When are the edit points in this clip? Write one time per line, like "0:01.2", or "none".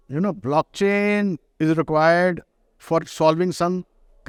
none